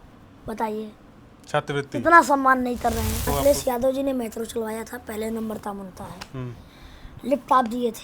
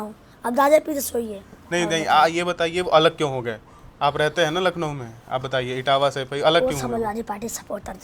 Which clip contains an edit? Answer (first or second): first